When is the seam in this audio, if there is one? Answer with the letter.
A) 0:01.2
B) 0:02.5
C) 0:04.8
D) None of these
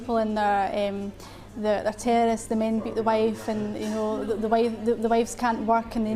D